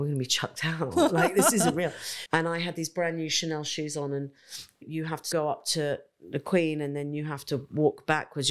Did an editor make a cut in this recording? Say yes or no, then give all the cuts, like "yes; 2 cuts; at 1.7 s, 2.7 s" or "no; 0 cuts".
yes; 2 cuts; at 2.1 s, 5.0 s